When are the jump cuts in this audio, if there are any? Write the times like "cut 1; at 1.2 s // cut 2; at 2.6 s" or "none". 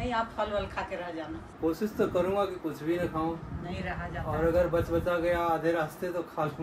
none